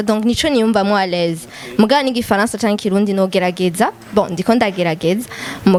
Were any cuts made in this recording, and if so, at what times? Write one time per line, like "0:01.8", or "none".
none